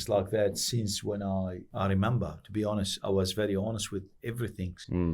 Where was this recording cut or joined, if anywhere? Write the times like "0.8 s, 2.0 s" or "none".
1.6 s